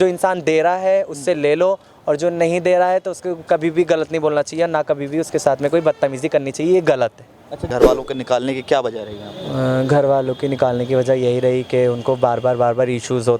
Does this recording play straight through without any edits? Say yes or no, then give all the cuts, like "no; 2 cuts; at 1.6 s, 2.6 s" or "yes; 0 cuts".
no; 1 cut; at 7.7 s